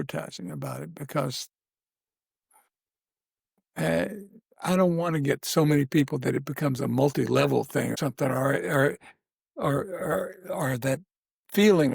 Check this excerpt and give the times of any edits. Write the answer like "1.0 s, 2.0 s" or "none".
7.9 s